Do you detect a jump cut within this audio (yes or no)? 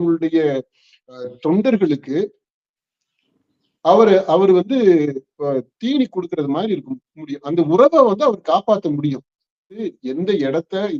yes